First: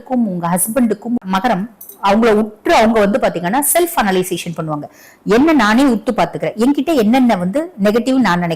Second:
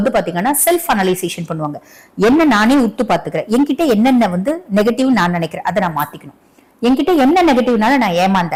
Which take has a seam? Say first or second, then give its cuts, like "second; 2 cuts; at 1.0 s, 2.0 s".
first; 1 cut; at 1.2 s